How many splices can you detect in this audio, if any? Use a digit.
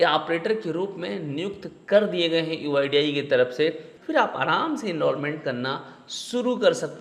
1